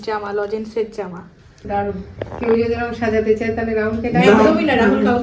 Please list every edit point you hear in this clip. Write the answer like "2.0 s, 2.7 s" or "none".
1.6 s